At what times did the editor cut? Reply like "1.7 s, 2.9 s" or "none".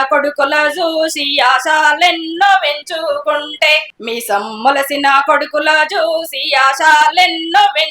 3.9 s